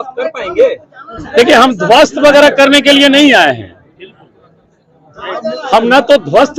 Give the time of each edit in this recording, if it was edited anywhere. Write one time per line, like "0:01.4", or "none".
none